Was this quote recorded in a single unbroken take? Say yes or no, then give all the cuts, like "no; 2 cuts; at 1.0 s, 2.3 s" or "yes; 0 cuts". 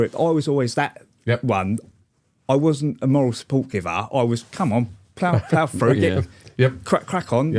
yes; 0 cuts